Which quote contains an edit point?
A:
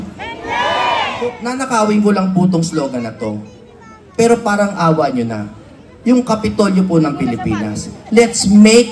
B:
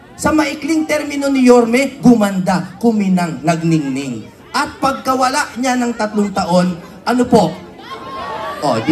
A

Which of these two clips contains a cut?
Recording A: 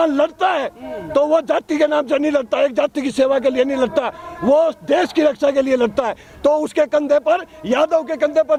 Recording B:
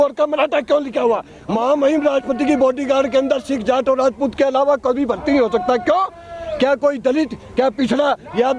B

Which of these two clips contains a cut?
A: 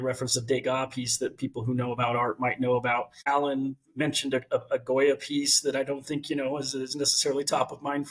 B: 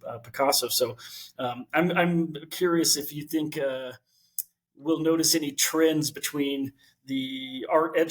A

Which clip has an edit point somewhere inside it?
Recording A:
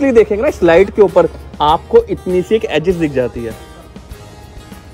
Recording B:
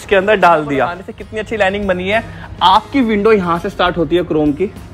B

